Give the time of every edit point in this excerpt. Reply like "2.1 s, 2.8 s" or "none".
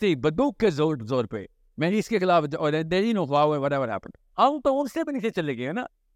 none